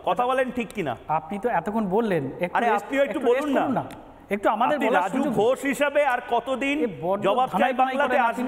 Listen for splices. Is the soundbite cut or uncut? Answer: uncut